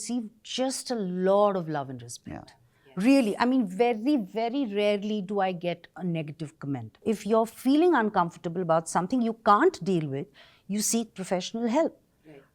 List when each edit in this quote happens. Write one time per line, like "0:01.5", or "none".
0:07.0